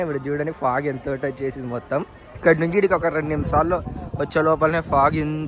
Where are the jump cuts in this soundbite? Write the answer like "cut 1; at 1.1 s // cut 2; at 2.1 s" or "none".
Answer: cut 1; at 2.4 s